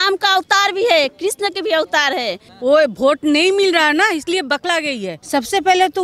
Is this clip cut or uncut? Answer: cut